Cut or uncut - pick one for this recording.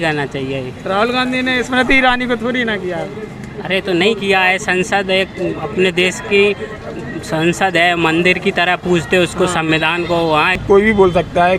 cut